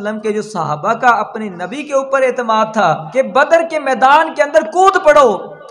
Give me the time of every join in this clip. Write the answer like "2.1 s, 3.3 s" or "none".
3.0 s